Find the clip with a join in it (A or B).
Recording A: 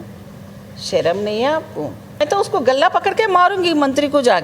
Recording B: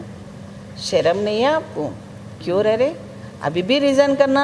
A